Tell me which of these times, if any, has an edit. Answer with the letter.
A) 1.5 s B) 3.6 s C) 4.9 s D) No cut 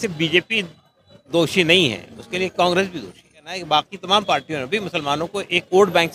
B